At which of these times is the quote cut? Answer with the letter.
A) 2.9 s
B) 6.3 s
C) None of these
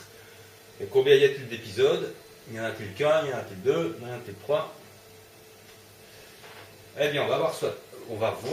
C